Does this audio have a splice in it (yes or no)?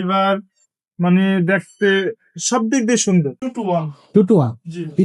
yes